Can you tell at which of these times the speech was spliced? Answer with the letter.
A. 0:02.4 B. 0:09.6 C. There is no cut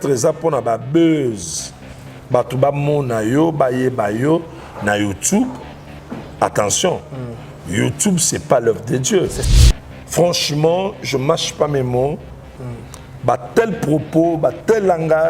B